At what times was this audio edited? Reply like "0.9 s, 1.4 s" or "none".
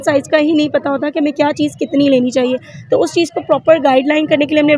none